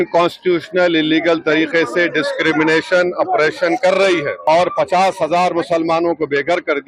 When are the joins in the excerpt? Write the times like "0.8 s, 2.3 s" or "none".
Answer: 4.4 s